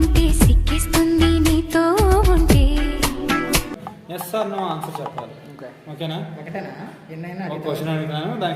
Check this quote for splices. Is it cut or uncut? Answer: cut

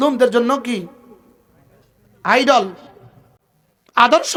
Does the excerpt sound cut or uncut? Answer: uncut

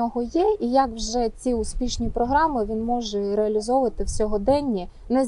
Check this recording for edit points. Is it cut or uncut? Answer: uncut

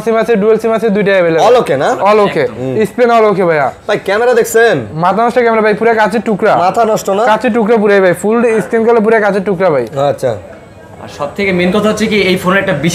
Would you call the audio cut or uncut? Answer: uncut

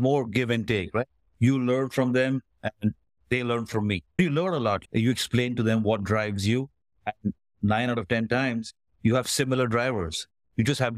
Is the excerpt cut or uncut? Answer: cut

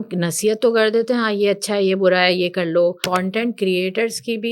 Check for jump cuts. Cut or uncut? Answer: cut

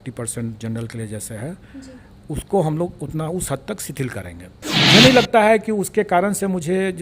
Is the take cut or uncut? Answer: cut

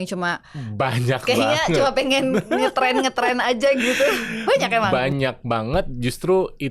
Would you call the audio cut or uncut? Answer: cut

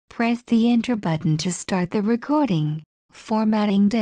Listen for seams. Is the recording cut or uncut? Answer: uncut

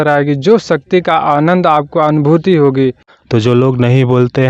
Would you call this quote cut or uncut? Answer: cut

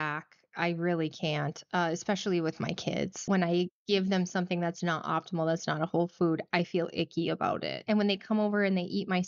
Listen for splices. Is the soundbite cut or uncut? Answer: cut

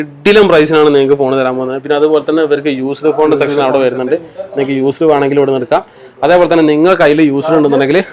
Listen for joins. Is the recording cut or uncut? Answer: uncut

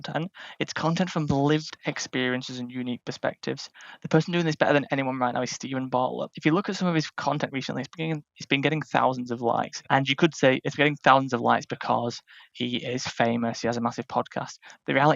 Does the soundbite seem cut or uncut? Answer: cut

